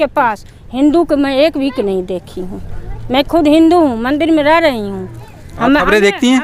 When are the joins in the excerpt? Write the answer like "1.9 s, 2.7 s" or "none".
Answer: none